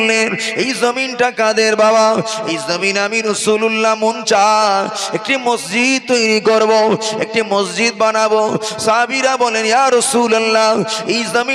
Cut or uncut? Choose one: uncut